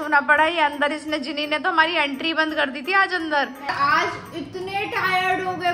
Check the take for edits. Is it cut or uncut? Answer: cut